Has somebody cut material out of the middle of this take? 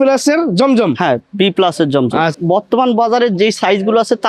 yes; 1 cut; at 2.3 s

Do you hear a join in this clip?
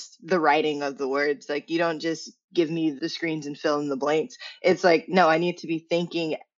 no; 0 cuts

